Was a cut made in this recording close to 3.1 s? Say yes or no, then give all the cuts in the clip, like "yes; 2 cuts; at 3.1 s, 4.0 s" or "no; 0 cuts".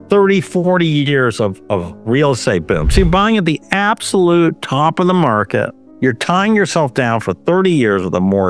no; 1 cut; at 5.8 s